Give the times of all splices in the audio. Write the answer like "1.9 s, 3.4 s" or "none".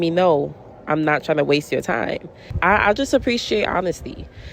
none